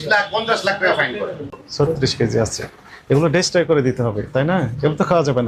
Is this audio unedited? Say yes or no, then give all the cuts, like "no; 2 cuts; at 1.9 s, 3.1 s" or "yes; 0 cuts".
no; 1 cut; at 1.5 s